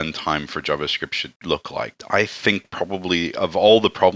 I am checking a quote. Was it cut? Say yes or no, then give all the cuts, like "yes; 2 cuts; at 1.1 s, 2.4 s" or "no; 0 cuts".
yes; 1 cut; at 1.6 s